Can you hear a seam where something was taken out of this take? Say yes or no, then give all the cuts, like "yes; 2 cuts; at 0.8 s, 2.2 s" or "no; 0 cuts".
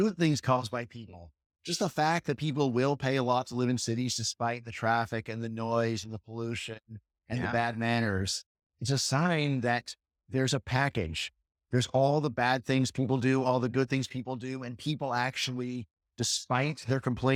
no; 0 cuts